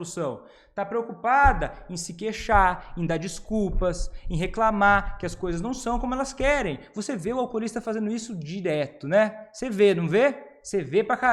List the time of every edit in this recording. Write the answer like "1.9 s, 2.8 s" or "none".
none